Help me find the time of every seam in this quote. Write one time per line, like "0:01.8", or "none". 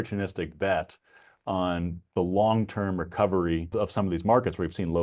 0:03.7